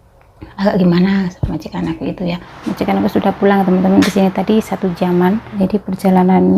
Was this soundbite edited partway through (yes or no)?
yes